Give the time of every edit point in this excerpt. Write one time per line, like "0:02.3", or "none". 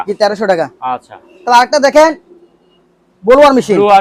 none